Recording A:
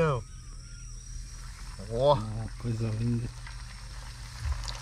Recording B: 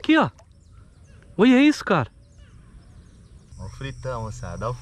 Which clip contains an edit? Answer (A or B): B